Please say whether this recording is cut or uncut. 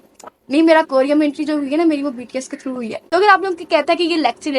cut